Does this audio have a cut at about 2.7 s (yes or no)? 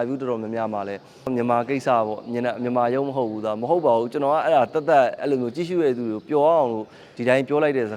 no